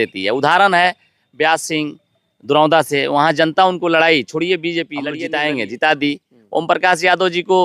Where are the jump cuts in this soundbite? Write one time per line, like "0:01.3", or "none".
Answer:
0:05.0